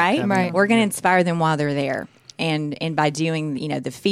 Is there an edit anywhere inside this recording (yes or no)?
no